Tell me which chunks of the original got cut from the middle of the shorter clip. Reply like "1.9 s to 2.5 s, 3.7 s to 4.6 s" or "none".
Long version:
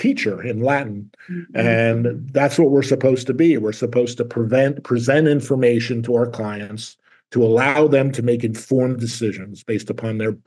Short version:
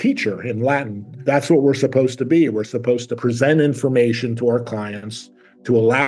1.1 s to 2.2 s, 4.2 s to 4.8 s